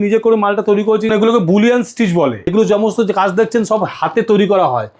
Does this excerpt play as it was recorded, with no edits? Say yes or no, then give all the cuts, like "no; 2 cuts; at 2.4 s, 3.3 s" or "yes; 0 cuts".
no; 2 cuts; at 1.0 s, 2.5 s